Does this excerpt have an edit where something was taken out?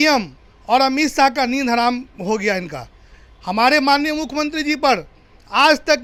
no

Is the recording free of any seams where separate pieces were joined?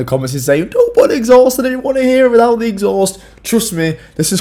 yes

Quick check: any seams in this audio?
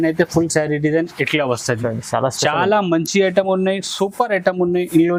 no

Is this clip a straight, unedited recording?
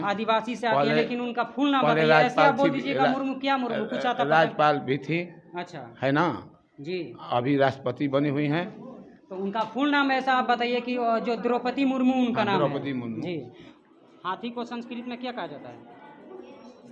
no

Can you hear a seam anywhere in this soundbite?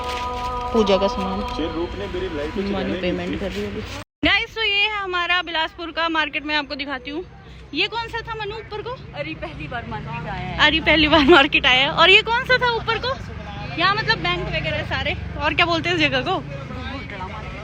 no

